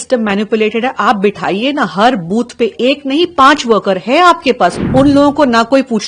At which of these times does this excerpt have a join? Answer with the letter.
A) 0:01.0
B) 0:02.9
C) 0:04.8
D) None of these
C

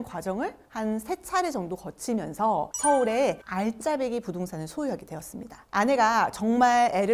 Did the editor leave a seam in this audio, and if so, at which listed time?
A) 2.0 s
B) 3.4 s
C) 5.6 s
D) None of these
D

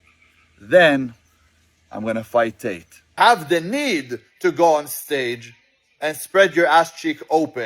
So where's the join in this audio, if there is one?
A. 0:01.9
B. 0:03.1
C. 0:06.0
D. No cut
B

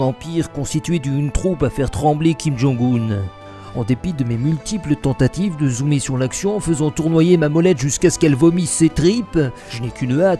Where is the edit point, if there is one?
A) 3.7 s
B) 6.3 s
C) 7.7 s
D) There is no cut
B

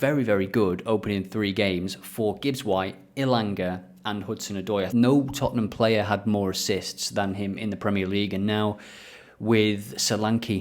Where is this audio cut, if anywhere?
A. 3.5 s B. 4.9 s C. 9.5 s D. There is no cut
B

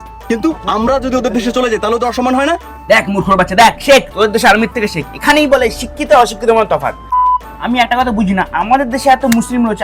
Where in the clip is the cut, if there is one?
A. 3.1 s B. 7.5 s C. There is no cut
C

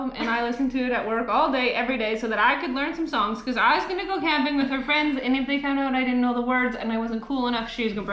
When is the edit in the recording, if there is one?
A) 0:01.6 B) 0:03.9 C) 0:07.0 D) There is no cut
D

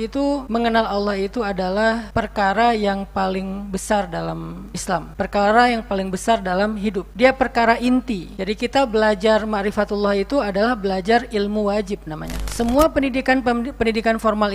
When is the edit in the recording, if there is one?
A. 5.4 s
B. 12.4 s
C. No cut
B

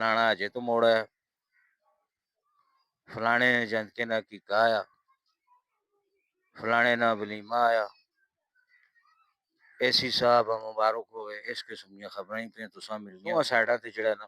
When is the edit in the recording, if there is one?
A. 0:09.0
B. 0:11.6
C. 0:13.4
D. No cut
C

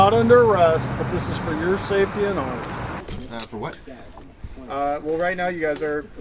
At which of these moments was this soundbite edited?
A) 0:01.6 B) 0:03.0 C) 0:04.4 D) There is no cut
B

